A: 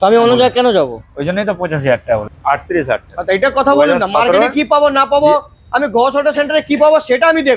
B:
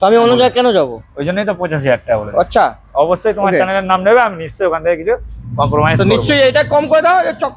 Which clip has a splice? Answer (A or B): A